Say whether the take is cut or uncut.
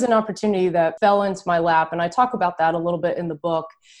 cut